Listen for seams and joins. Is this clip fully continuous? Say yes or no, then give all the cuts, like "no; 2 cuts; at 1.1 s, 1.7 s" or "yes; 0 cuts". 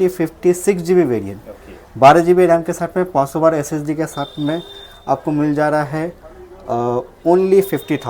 yes; 0 cuts